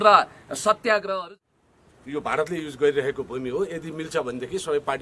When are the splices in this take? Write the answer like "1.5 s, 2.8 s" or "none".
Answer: 1.3 s